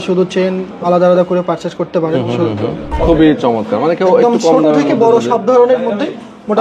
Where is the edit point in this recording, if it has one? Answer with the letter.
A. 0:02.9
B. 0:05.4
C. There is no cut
A